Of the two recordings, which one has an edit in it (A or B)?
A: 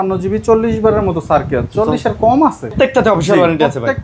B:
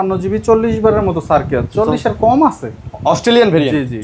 A